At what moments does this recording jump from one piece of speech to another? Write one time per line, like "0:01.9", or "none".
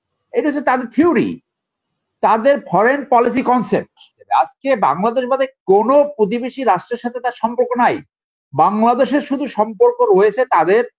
0:04.2

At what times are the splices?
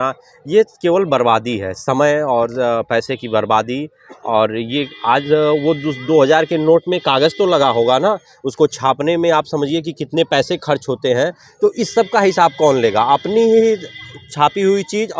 none

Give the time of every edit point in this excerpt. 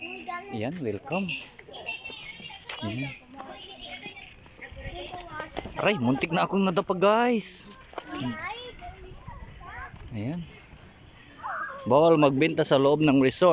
0:04.2
0:08.3

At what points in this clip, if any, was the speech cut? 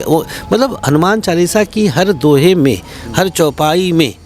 none

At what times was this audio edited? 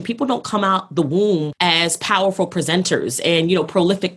0:01.5

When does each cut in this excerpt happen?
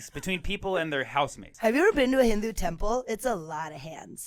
0:01.4

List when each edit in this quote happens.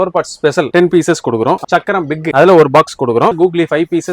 0:01.6
0:03.3

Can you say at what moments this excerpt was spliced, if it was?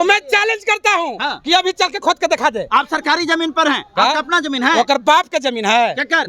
0:02.7

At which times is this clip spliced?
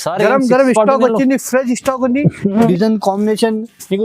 0:02.7

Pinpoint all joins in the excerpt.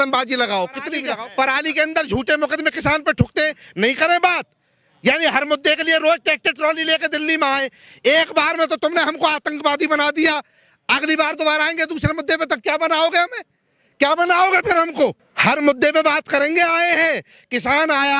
0:01.0
0:15.3

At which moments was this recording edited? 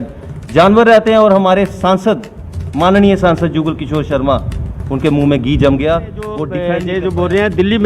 0:06.5

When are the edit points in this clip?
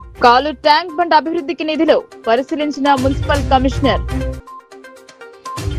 none

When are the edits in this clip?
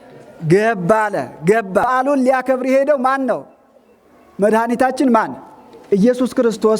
0:01.9

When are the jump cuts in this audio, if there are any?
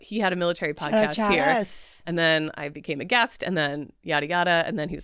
0:02.0

